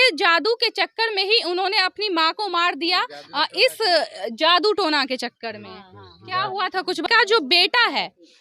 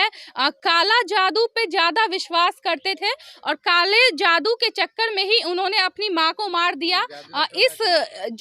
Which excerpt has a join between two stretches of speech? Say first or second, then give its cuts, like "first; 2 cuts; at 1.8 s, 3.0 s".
first; 1 cut; at 7.0 s